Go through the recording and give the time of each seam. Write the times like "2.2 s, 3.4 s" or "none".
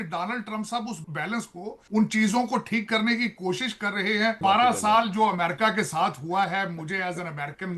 1.0 s, 4.4 s